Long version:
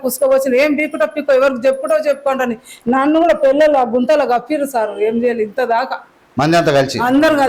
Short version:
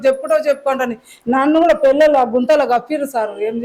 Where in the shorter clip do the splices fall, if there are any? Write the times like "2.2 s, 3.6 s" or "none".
none